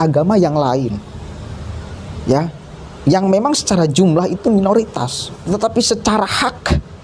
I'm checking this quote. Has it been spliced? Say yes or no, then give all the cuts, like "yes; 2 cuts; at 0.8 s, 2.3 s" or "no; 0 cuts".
yes; 1 cut; at 5.3 s